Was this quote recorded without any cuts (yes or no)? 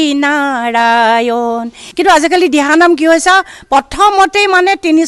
no